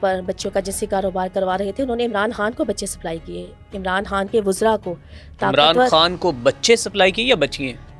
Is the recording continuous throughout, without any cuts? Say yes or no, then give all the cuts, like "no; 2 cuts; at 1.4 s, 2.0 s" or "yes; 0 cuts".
yes; 0 cuts